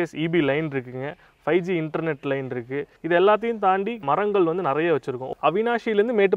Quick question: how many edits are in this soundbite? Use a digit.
3